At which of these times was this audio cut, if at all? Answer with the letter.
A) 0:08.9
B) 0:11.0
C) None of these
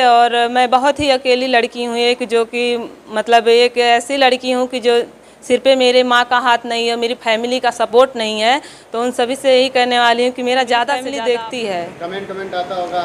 B